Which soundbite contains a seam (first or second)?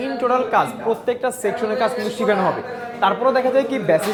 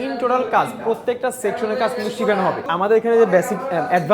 second